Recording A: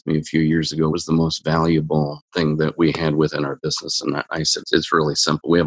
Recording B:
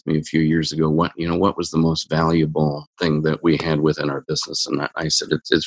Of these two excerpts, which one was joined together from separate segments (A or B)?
A